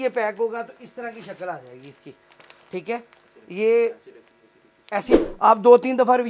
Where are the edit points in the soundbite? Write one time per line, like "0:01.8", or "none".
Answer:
0:05.1